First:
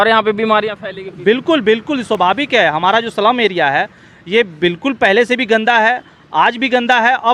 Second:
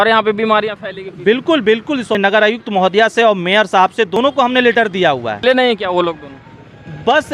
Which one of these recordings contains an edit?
second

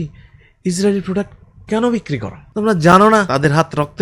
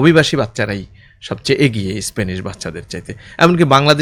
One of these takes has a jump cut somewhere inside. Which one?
first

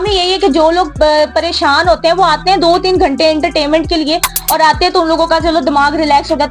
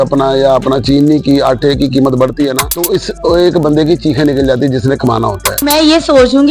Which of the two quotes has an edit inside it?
second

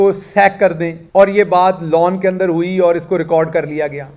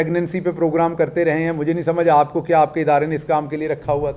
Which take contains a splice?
first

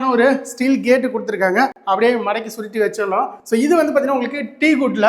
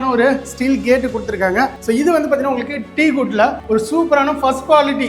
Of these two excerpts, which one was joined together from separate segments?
second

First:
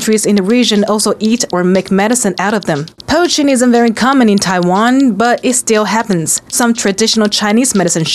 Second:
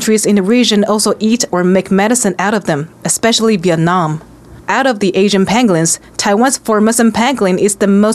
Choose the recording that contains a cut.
first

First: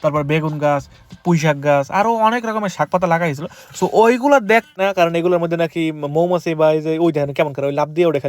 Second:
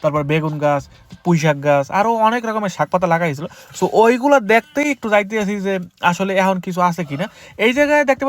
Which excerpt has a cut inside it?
first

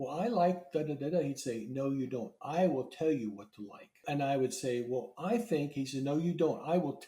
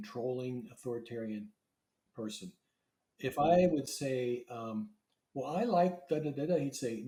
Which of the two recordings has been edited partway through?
first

